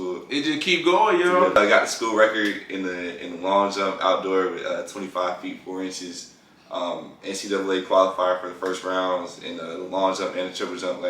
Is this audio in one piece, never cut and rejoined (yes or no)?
no